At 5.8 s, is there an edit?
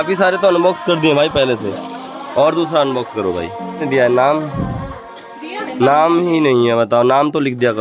no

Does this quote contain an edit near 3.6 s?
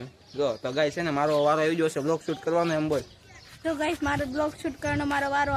no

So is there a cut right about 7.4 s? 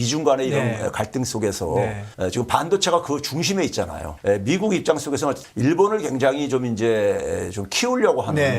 no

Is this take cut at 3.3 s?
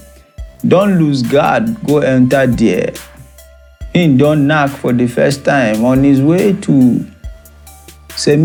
no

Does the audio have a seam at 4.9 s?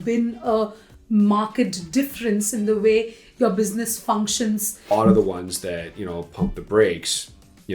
yes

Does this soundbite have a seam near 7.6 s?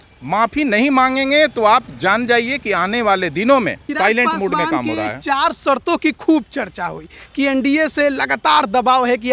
no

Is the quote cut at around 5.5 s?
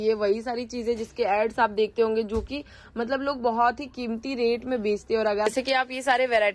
yes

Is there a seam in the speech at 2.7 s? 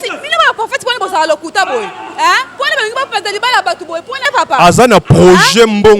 no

